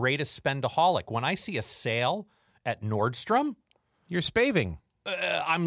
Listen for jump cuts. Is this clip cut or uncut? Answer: uncut